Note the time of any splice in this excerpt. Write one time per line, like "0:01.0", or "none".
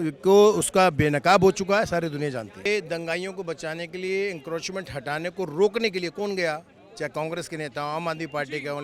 none